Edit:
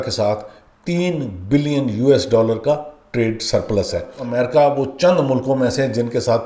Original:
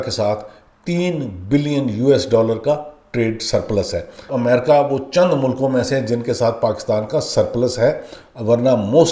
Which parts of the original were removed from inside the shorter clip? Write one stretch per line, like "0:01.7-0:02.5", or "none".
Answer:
0:04.2-0:04.3